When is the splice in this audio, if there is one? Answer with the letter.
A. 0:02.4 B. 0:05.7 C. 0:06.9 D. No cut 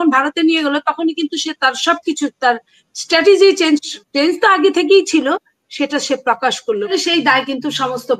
C